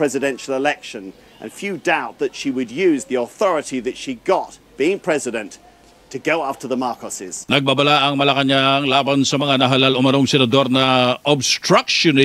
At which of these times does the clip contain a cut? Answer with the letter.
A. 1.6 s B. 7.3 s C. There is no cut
B